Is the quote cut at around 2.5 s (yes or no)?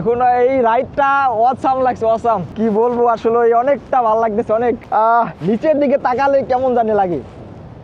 yes